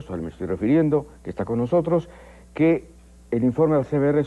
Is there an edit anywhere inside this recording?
yes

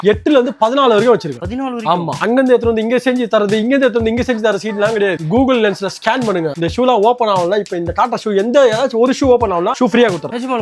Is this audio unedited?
no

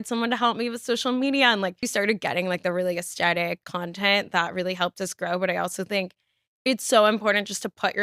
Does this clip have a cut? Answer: yes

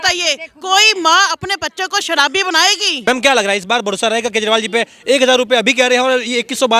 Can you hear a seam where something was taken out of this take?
yes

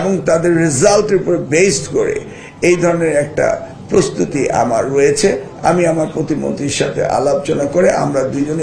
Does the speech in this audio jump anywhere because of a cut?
no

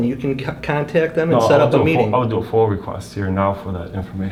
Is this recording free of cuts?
yes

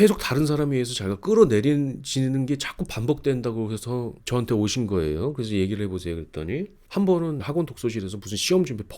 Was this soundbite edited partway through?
yes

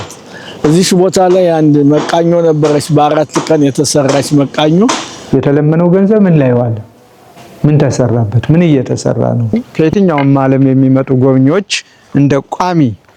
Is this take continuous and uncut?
no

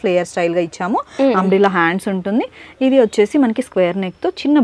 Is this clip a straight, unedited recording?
yes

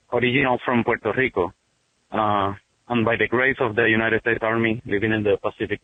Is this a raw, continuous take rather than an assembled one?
yes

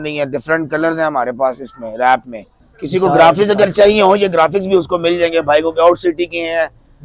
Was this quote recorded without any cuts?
yes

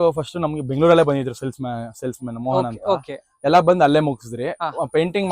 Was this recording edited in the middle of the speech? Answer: no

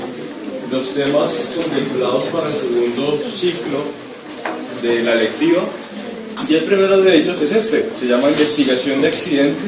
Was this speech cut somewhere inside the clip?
no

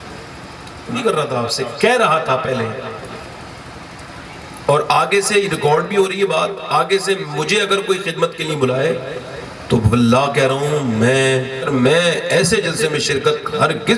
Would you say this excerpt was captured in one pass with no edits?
no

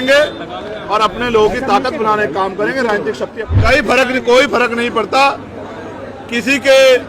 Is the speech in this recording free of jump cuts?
no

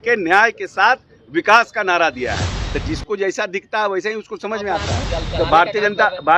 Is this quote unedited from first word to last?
no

